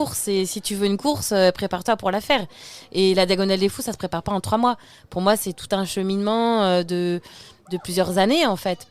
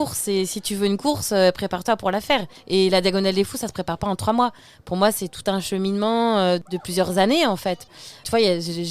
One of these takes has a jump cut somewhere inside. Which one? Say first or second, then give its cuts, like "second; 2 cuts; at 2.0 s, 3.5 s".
second; 3 cuts; at 2.5 s, 6.6 s, 8.2 s